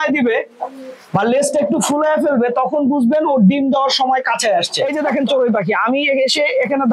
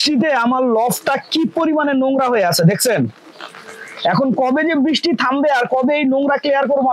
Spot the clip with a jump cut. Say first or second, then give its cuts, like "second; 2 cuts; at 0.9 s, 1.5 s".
first; 1 cut; at 4.8 s